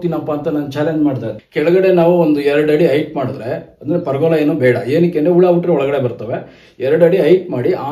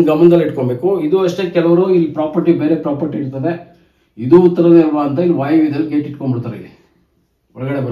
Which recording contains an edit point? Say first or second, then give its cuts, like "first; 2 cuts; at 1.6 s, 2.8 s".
first; 1 cut; at 1.3 s